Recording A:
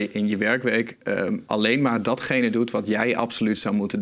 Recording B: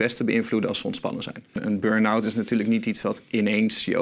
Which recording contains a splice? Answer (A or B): B